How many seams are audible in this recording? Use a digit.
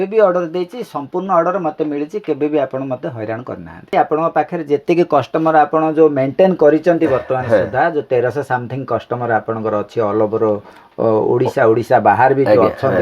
1